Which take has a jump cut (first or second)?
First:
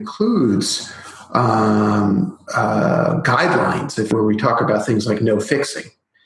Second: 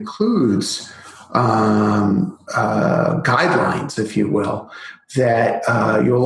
first